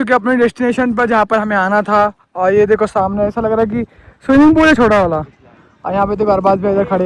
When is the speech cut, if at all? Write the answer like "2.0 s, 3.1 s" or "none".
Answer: none